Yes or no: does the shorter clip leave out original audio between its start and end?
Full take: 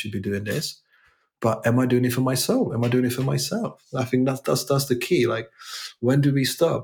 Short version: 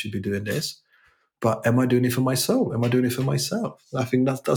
no